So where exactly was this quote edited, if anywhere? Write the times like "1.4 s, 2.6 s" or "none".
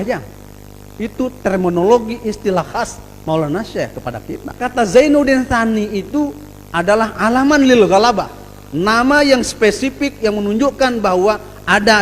4.6 s